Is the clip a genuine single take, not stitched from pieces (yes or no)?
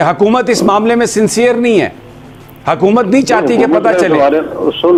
yes